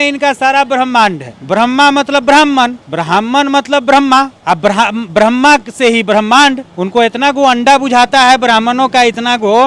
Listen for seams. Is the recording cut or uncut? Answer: uncut